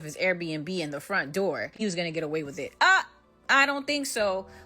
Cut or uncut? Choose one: cut